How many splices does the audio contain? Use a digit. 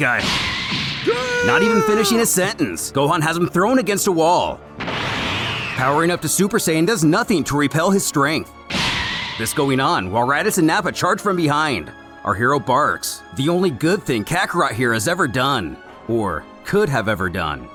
0